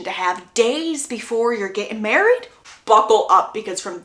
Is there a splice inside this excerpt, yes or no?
yes